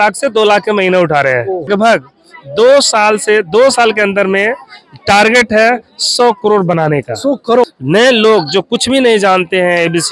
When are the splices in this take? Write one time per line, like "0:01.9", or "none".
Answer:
0:01.7
0:07.6